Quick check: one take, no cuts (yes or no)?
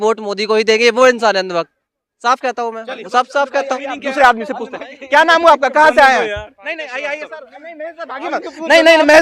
yes